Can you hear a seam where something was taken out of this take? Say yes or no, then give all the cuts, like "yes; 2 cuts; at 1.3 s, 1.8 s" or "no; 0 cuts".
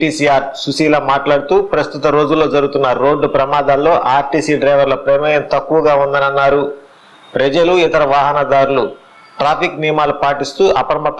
no; 0 cuts